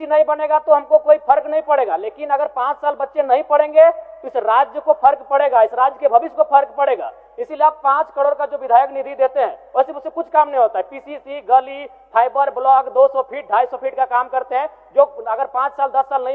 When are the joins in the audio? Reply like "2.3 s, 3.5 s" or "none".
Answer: none